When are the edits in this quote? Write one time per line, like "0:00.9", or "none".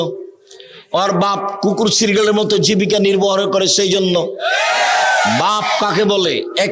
none